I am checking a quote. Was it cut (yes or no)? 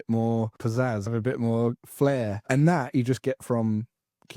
yes